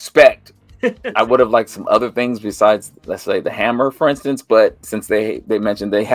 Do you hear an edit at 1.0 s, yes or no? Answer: yes